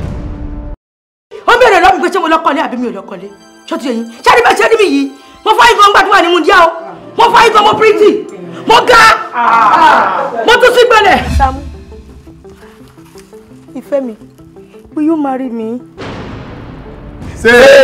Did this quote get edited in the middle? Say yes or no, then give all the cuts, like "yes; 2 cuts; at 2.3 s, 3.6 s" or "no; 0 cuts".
yes; 1 cut; at 1.1 s